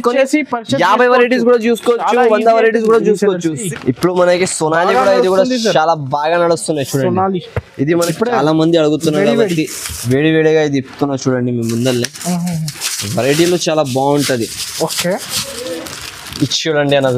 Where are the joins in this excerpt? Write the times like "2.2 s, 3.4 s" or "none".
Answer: 3.7 s, 8.0 s

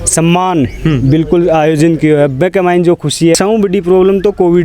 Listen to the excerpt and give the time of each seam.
3.3 s

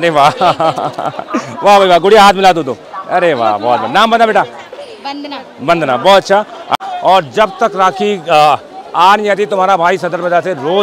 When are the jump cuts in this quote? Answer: 6.8 s

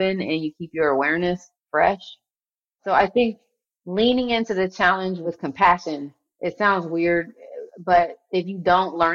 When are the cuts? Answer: 1.5 s

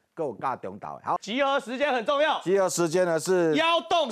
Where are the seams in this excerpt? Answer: 1.2 s

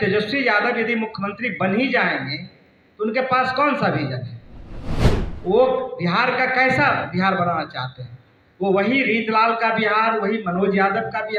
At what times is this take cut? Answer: none

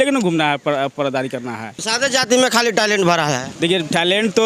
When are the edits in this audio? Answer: 1.8 s, 3.5 s

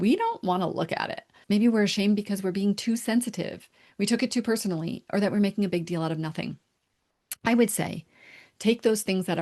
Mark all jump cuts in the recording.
1.3 s

